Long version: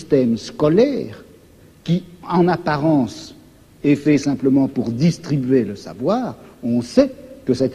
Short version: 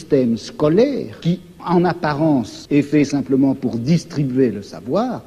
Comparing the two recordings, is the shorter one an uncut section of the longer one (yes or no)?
no